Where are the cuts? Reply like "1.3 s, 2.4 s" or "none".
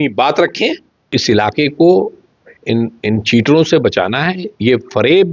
1.1 s